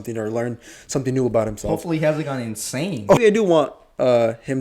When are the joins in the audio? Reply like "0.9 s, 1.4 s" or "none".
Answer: 3.2 s